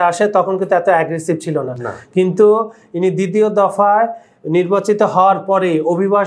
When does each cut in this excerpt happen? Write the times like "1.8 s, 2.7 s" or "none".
none